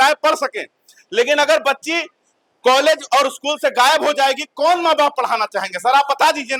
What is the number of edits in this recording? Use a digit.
0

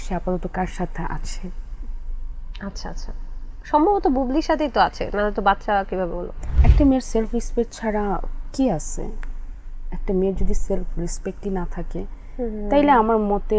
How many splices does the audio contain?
1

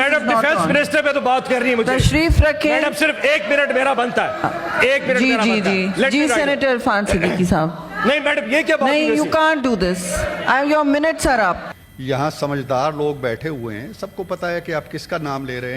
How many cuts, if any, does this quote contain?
1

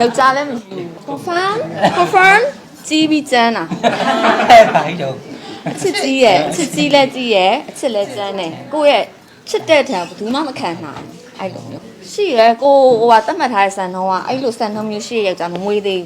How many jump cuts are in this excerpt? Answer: 2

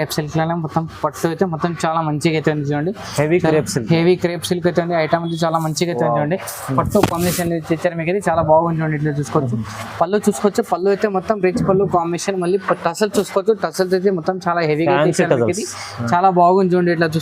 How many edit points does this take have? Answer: 0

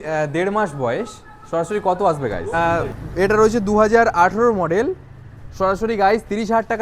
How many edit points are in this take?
1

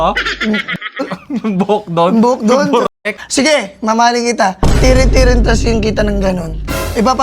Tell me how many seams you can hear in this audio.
1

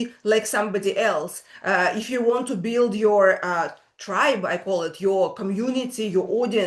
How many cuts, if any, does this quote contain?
0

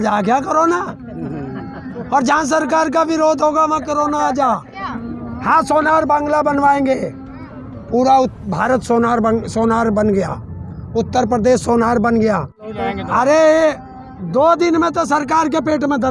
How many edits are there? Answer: 2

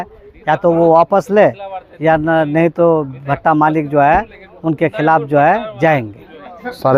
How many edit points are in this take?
0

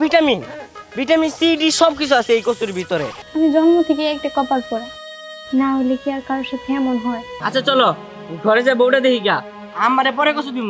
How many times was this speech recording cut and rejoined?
2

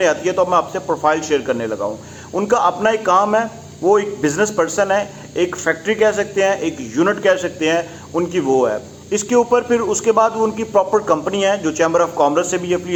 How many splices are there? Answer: 0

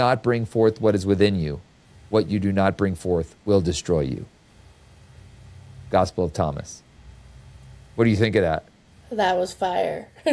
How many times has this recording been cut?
0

